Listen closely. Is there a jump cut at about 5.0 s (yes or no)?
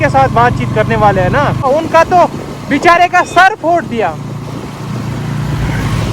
no